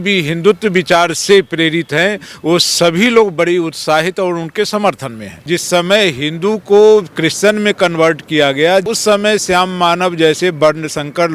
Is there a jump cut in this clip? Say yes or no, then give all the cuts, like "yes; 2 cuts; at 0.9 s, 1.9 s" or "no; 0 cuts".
yes; 2 cuts; at 5.4 s, 8.8 s